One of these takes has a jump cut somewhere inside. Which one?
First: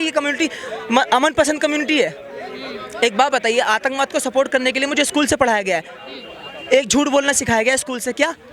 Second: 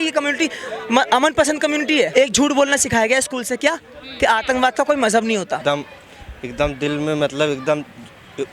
second; 2 cuts; at 2.1 s, 5.6 s

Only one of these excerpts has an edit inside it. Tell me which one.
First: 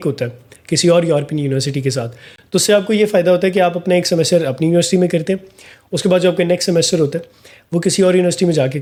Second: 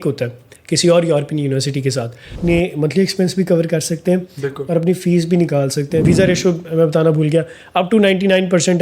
second; 2 cuts; at 2.4 s, 6.0 s

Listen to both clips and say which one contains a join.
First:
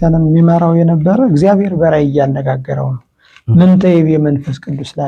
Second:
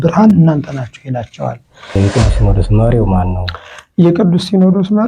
second; 1 cut; at 1.9 s

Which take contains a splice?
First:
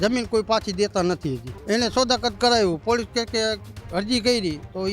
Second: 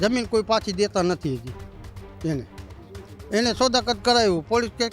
first; 1 cut; at 1.5 s

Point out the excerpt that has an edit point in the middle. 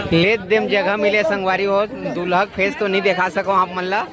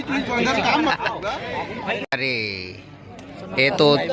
second; 1 cut; at 2.1 s

